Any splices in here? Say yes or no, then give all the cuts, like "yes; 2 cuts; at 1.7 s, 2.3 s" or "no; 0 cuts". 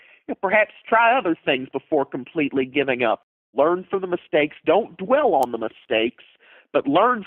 yes; 1 cut; at 3.5 s